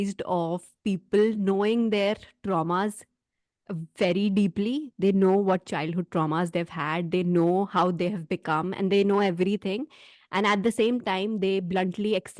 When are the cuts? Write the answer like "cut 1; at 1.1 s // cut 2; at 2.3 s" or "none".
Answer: none